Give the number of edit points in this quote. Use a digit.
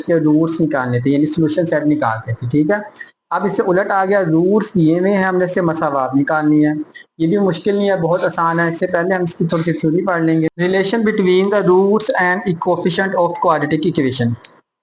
0